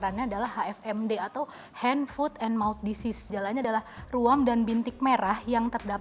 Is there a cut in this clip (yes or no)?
yes